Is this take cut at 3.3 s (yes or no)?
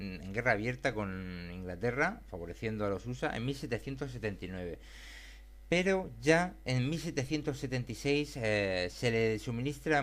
no